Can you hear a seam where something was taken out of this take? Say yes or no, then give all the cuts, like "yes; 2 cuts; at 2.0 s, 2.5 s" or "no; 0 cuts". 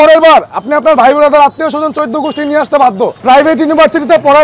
yes; 1 cut; at 3.2 s